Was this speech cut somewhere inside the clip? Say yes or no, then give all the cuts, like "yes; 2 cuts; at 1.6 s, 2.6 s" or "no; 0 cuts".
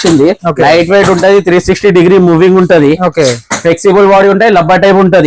no; 0 cuts